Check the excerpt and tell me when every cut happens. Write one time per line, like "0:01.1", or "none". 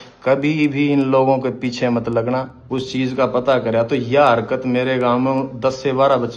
0:02.6